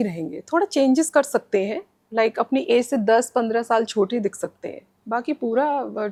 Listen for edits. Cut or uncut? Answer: uncut